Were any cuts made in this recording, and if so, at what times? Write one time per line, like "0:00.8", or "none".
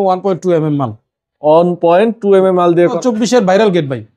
0:03.0

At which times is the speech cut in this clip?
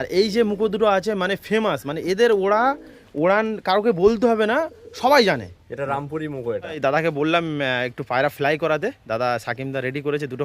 0:06.7

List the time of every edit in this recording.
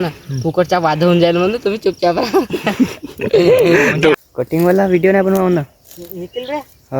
0:04.2

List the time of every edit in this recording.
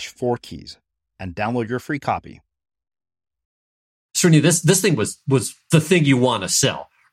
0:04.1
0:05.6

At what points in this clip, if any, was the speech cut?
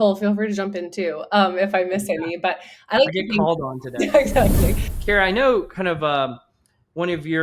0:04.9

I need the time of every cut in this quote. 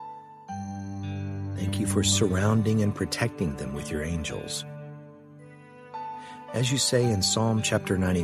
none

